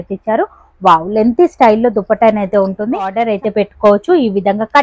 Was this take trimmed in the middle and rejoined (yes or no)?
yes